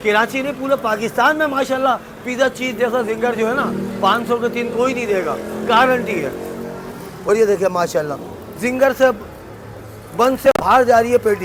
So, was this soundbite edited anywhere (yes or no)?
no